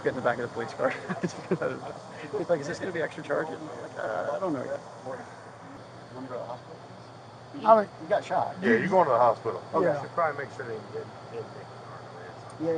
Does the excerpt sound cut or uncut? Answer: uncut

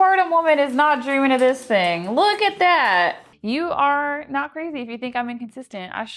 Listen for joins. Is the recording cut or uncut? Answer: cut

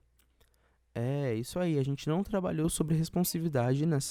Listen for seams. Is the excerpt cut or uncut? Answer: uncut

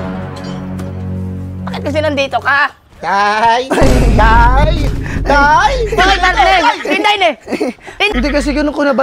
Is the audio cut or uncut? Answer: cut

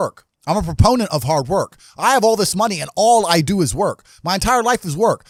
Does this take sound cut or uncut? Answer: uncut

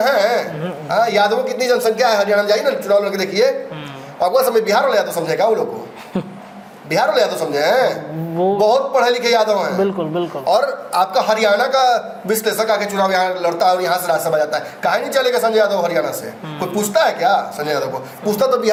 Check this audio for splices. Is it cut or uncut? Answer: uncut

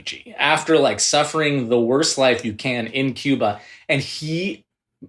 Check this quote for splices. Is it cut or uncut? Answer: uncut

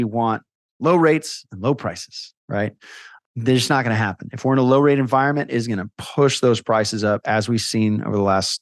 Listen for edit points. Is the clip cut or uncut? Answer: uncut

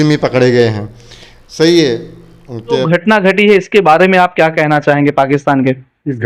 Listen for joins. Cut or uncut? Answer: cut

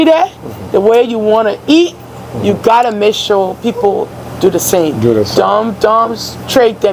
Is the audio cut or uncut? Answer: uncut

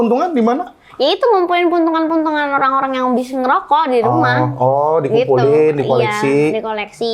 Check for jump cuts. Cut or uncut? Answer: uncut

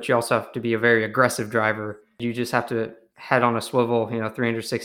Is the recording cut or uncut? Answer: cut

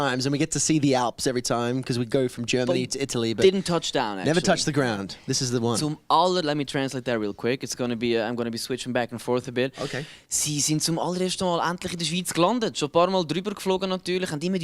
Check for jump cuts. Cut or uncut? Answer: cut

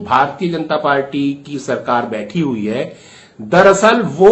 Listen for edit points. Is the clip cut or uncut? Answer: uncut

